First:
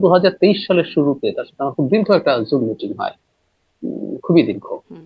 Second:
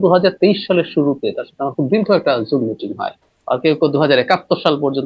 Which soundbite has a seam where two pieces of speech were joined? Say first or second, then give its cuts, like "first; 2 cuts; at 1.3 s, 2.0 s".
second; 1 cut; at 3.3 s